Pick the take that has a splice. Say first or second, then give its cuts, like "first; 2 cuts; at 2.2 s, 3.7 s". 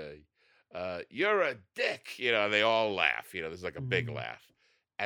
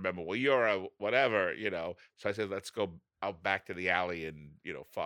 second; 2 cuts; at 2.0 s, 3.0 s